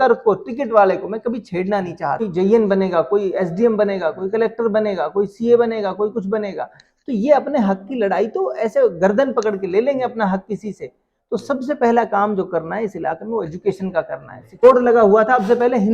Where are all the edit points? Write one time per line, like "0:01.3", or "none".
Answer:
0:02.3
0:14.6